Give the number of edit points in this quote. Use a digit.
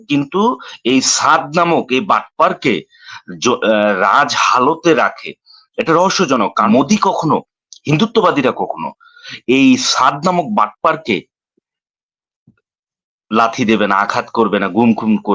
1